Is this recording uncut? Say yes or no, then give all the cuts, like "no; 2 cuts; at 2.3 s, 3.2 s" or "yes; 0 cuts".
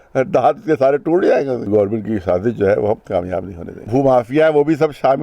no; 2 cuts; at 1.7 s, 3.8 s